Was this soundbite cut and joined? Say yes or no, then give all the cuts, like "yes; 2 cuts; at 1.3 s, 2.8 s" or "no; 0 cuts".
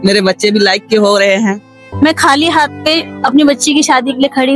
yes; 1 cut; at 1.8 s